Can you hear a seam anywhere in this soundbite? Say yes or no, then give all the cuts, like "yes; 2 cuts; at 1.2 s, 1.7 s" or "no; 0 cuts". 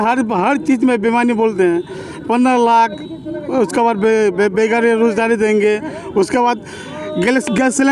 no; 0 cuts